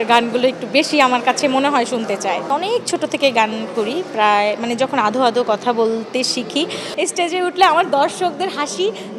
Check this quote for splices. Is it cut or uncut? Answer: cut